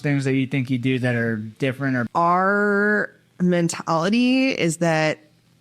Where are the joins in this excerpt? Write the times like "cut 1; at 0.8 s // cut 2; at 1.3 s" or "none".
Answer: cut 1; at 2.1 s